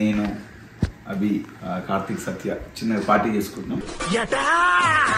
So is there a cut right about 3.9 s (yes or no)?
yes